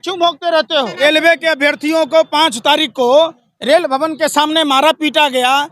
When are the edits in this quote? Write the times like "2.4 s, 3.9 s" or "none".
1.0 s